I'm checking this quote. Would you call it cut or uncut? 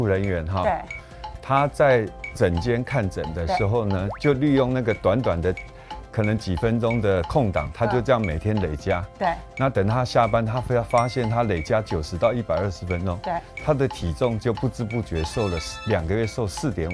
uncut